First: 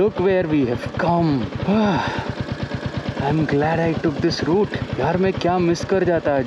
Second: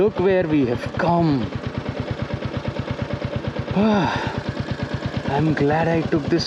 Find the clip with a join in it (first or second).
first